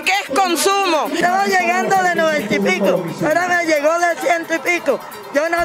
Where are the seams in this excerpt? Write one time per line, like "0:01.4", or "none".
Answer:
0:01.2